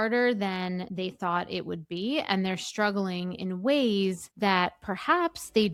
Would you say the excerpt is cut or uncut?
uncut